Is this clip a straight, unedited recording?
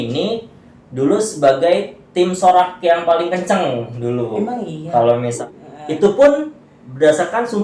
no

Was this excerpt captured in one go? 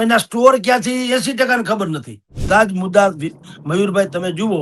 no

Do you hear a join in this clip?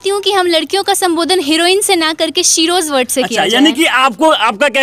no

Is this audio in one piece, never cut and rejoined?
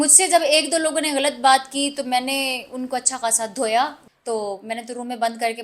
no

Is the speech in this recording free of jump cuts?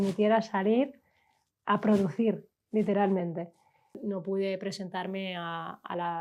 no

